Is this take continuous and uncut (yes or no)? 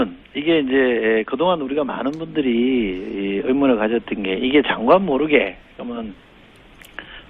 no